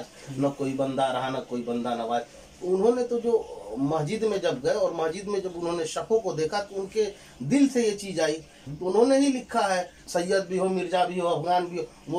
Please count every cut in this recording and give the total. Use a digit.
2